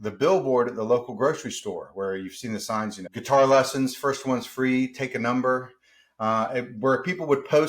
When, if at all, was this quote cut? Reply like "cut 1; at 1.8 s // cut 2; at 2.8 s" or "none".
cut 1; at 3.1 s